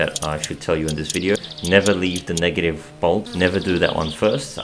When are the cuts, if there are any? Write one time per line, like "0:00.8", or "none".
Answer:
0:01.4
0:03.3